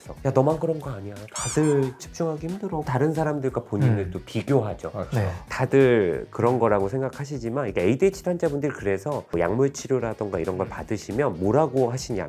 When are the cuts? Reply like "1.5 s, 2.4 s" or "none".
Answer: 2.8 s, 5.4 s